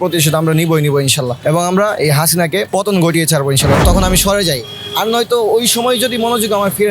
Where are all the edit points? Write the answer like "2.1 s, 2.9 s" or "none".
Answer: 1.3 s, 2.7 s, 3.8 s

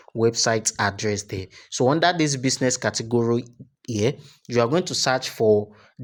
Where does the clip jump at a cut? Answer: none

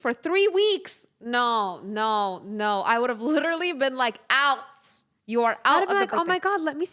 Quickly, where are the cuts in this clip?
none

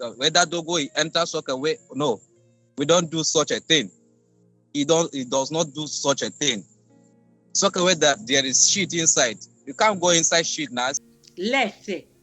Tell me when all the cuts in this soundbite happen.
11.0 s

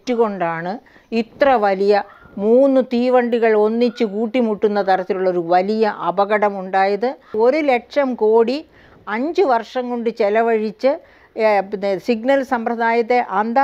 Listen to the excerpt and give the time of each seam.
7.4 s

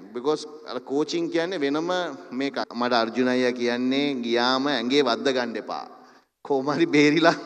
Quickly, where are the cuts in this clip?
2.6 s

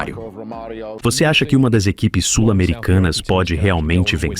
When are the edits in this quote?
0.9 s

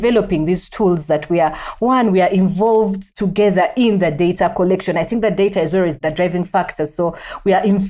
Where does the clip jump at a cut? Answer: none

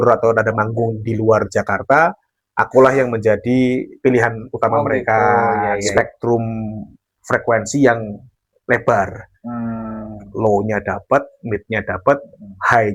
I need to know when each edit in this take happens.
5.9 s

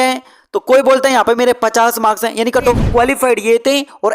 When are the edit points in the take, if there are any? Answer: 2.8 s

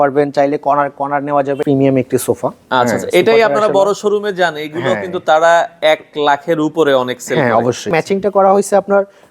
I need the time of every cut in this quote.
1.6 s, 7.9 s

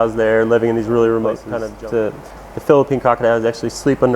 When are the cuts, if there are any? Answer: 2.1 s

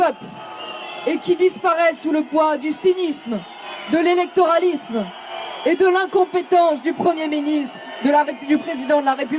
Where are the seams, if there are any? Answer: none

